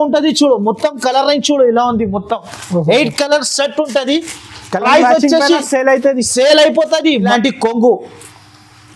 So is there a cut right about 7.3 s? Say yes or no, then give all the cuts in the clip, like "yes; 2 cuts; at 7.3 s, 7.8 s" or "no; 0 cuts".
yes; 1 cut; at 7.3 s